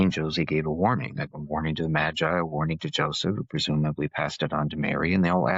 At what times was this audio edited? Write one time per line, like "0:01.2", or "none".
none